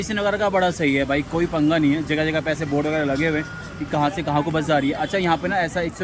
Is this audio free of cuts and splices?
yes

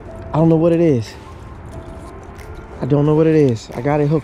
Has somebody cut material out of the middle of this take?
no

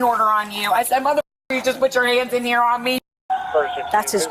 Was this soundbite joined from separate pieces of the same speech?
yes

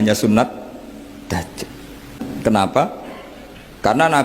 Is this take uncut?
no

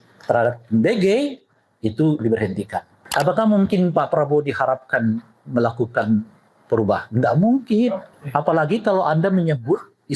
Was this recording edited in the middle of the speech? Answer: yes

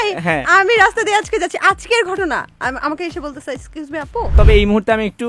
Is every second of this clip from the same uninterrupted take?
no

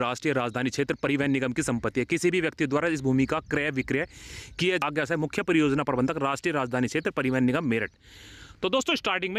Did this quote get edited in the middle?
no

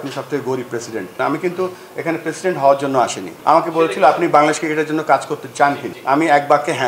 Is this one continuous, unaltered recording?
no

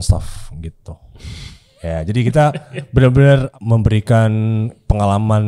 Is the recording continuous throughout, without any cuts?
no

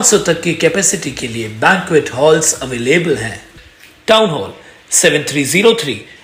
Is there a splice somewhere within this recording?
no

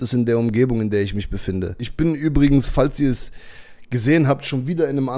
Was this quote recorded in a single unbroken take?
no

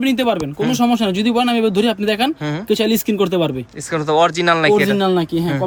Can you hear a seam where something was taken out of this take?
no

